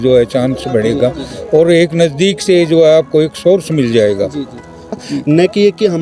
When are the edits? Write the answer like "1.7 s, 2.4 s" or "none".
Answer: 5.0 s